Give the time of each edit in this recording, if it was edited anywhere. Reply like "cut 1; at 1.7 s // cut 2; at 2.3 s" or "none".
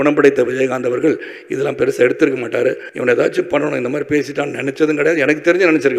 cut 1; at 2.9 s